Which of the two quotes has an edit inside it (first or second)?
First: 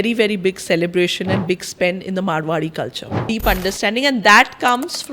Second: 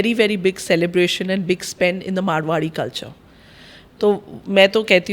first